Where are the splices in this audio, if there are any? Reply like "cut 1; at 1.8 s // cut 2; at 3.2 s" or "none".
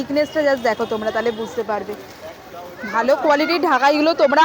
none